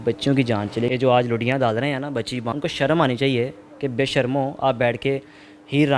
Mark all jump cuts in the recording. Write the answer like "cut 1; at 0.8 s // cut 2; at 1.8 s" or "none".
cut 1; at 0.9 s // cut 2; at 2.5 s